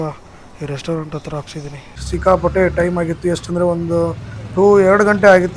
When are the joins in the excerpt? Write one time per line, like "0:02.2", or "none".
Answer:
0:02.1